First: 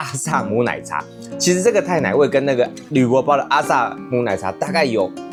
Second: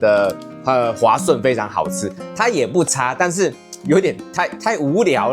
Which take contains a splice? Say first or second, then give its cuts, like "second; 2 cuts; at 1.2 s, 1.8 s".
second; 1 cut; at 2.2 s